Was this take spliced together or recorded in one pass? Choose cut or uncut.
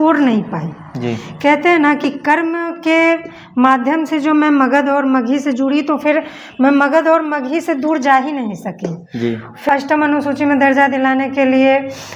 cut